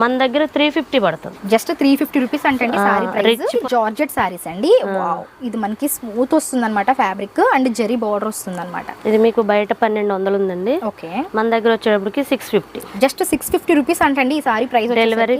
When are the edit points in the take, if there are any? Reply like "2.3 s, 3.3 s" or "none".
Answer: 1.4 s, 3.5 s, 12.9 s